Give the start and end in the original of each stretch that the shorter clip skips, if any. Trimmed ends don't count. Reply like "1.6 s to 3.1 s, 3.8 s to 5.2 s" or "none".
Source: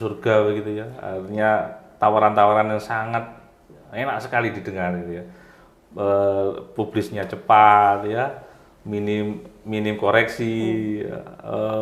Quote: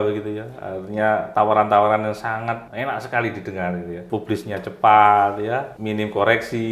1.7 s to 1.9 s, 3.3 s to 3.9 s, 5.2 s to 6.7 s, 8.4 s to 9.6 s